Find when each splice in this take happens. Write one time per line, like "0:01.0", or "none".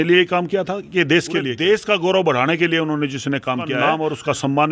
0:01.5
0:03.8